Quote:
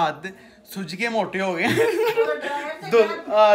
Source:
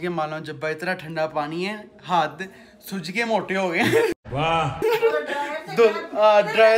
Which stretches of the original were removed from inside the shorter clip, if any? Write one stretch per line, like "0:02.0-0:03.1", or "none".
0:04.1-0:04.8